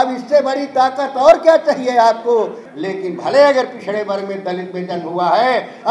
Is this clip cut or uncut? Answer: cut